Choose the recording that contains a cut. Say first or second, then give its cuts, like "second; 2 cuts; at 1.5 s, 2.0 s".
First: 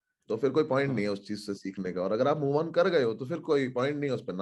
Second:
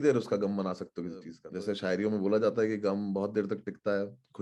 second; 1 cut; at 1.4 s